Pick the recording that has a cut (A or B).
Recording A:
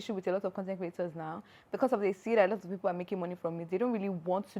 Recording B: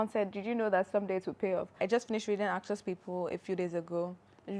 B